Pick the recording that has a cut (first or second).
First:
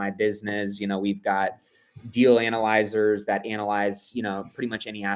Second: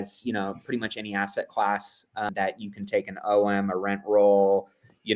second